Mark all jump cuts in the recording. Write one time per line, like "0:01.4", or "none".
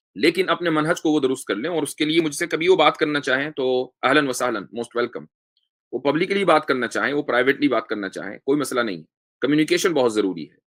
none